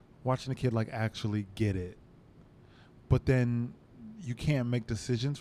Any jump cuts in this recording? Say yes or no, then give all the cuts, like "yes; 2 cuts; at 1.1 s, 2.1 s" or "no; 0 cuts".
no; 0 cuts